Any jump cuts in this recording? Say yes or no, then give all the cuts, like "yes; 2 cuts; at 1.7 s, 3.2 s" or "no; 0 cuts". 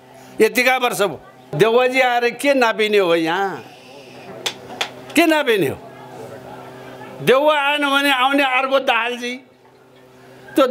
yes; 1 cut; at 1.5 s